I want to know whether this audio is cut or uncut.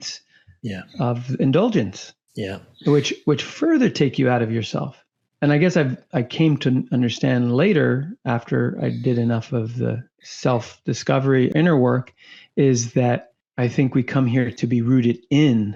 uncut